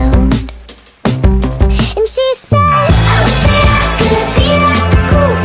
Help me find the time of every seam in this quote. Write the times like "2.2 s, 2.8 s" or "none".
none